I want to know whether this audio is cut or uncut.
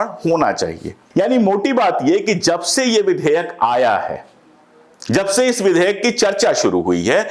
cut